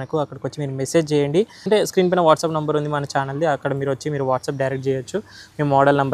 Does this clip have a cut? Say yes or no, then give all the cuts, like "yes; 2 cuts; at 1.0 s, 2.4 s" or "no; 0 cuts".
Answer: yes; 1 cut; at 1.7 s